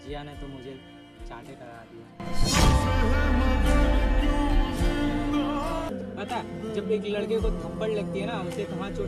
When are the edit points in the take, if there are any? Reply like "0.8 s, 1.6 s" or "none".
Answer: 5.9 s